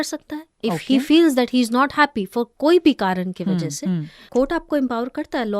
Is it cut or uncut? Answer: cut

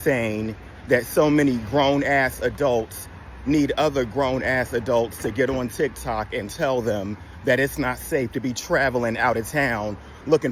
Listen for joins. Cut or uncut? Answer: uncut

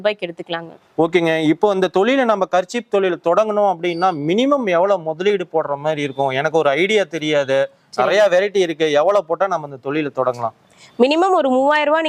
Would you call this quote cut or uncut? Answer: uncut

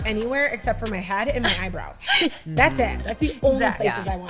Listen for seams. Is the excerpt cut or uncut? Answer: uncut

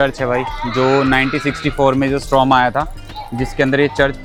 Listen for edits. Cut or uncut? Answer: uncut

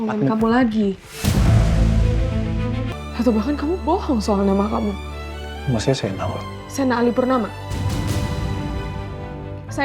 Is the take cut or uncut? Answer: cut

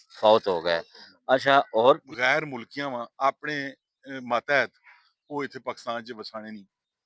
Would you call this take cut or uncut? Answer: cut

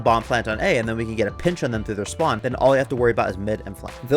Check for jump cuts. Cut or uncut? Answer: cut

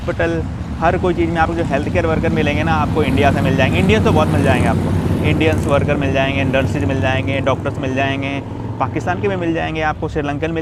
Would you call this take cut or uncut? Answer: uncut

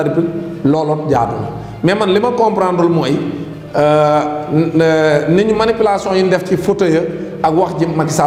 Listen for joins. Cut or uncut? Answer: uncut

